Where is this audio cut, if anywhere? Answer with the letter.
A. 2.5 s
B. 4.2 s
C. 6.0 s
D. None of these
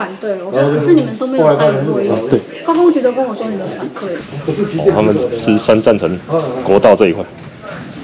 B